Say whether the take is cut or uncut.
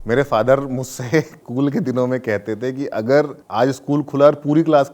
cut